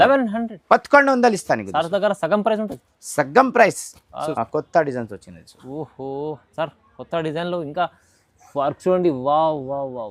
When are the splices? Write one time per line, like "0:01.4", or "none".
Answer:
0:04.2

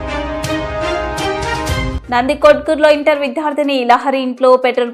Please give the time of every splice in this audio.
0:01.9

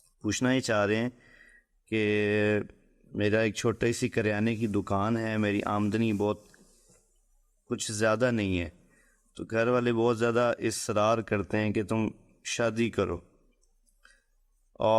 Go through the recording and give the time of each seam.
none

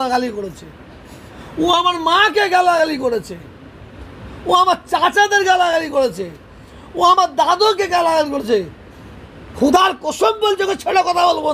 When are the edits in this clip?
none

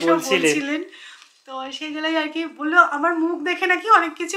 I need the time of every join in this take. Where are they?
none

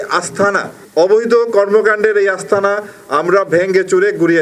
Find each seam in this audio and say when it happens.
none

